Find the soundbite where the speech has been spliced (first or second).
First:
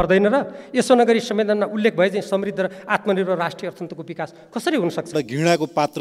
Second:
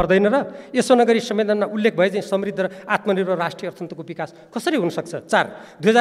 first